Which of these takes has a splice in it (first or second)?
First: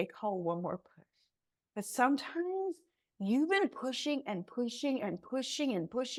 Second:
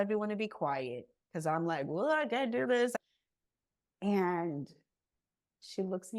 second